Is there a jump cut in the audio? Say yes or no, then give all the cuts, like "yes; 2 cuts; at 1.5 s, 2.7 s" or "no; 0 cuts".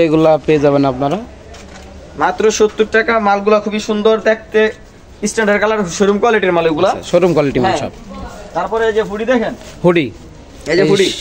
no; 0 cuts